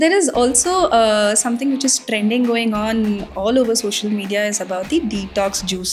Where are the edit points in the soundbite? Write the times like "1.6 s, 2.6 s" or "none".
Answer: none